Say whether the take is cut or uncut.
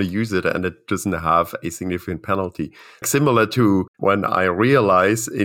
cut